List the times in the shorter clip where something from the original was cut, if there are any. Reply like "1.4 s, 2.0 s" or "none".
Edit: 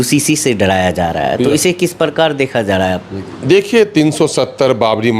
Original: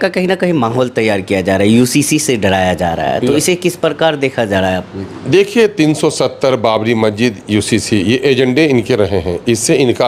none